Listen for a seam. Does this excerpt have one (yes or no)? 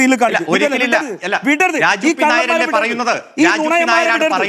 no